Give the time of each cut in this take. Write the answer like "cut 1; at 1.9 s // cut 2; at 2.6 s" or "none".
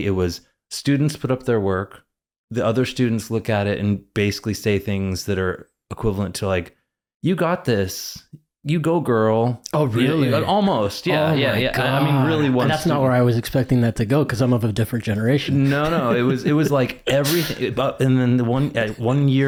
none